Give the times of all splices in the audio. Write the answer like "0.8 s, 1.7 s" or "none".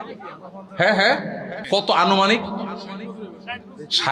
1.5 s